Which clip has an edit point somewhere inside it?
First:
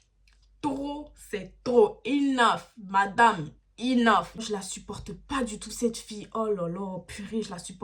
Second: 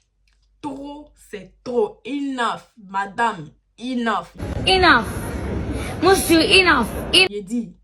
first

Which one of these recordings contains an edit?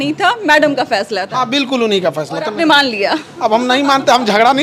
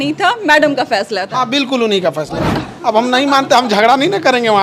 second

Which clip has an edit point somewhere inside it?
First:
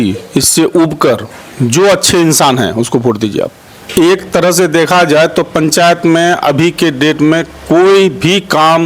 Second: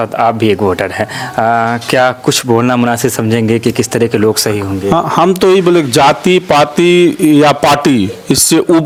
first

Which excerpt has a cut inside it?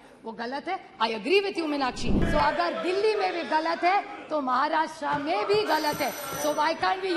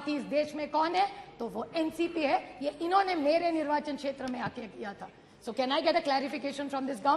first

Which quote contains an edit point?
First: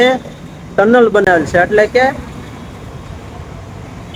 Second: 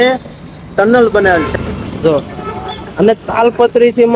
second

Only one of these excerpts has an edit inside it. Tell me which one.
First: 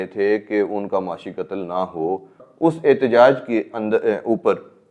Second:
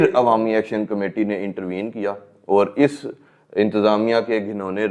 first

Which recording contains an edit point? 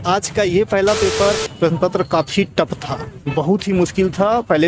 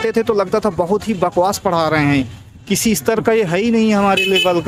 first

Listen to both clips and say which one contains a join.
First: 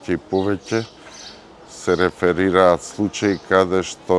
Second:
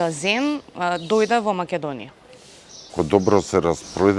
second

